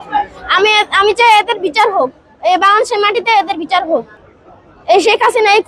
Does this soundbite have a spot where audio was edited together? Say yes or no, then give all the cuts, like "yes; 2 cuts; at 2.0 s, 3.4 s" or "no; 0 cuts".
yes; 1 cut; at 4.1 s